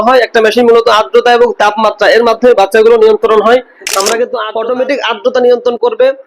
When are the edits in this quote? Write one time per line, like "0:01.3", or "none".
0:04.4

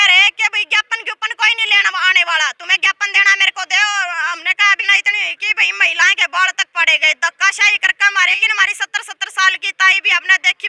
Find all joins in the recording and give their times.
0:04.8
0:08.4

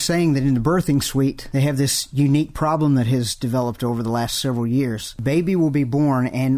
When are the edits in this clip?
0:01.4
0:05.1

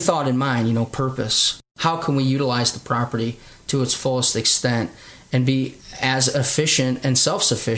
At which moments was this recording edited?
0:01.7

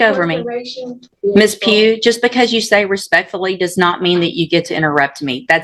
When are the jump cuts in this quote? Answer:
0:01.1

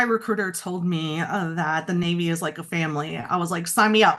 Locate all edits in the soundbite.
none

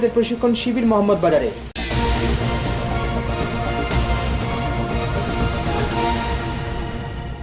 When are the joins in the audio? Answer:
none

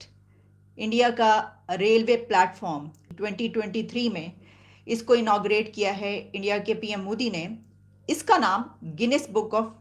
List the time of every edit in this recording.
0:03.1

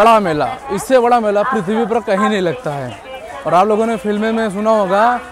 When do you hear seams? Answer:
none

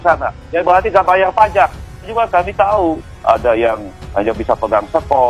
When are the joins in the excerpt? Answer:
0:01.9

